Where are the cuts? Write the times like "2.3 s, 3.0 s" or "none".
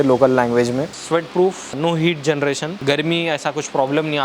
1.0 s, 1.8 s, 2.7 s